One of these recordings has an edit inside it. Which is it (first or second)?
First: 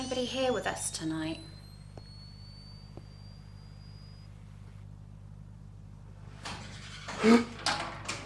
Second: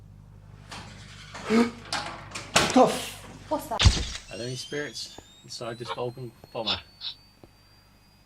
second